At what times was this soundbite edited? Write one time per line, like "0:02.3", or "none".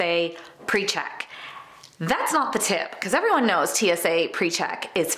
none